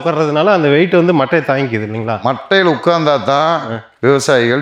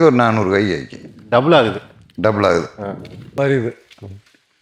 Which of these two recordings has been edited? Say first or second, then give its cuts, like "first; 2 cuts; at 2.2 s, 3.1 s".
second; 1 cut; at 3.1 s